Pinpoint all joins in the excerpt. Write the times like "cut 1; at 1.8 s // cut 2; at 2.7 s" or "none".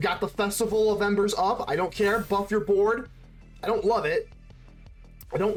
none

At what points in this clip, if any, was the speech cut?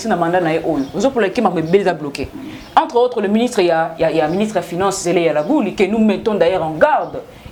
none

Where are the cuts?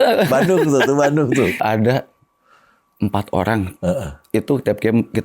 cut 1; at 1.6 s

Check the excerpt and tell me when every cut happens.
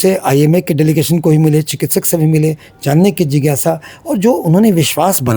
none

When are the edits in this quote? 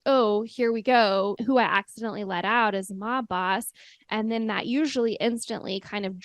cut 1; at 1.4 s

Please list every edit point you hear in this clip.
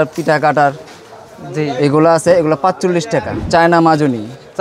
cut 1; at 3.4 s

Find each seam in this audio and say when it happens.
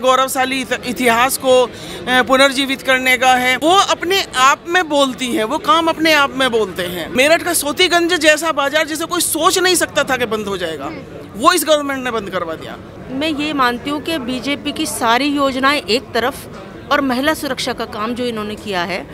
cut 1; at 7.0 s // cut 2; at 13.0 s

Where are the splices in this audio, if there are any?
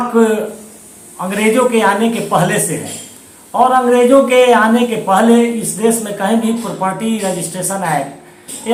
none

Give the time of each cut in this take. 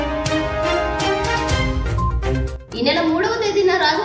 cut 1; at 2.5 s

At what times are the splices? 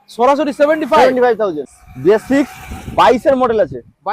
cut 1; at 1.7 s

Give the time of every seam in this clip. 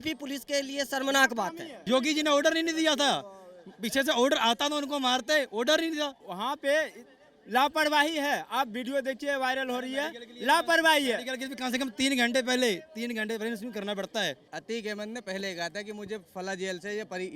cut 1; at 1.8 s // cut 2; at 14.5 s

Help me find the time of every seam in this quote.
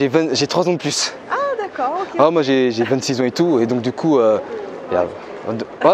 none

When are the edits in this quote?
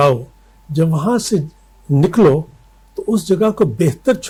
none

